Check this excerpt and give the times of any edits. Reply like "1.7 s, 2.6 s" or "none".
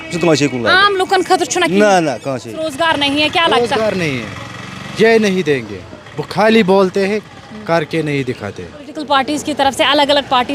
2.7 s, 8.9 s